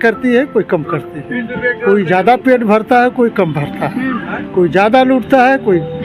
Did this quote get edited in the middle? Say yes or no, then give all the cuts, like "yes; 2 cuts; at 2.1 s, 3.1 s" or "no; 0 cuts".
no; 0 cuts